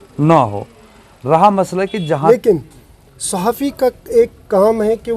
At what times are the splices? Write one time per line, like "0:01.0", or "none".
0:02.3